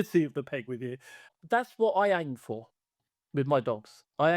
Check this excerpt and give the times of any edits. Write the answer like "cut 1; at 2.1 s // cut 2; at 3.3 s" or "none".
cut 1; at 1.3 s